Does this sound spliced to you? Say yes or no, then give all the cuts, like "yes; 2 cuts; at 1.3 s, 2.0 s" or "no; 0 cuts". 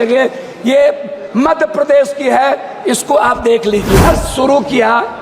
yes; 1 cut; at 4.0 s